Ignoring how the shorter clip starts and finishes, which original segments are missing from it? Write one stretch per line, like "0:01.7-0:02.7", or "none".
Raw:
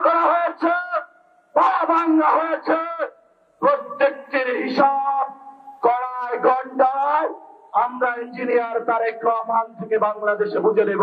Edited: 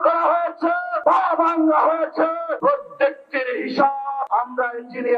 0:00.9-0:01.4
0:03.0-0:03.5
0:05.3-0:07.7